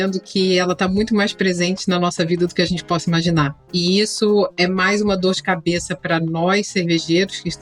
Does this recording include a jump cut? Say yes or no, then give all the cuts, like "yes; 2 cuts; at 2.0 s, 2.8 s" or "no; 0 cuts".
yes; 1 cut; at 3.6 s